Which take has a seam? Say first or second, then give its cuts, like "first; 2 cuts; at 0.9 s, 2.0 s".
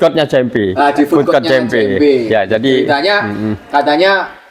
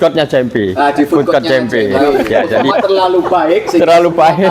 second; 1 cut; at 2.2 s